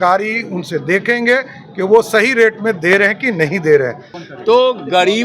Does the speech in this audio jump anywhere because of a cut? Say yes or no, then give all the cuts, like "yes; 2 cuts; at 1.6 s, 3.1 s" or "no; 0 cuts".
yes; 1 cut; at 4.1 s